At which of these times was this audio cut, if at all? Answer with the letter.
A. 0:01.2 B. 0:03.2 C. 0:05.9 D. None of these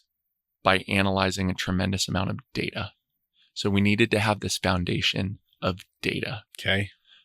D